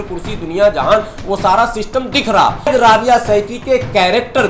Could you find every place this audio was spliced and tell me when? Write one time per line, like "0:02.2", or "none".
0:02.7